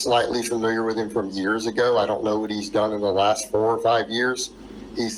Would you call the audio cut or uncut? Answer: uncut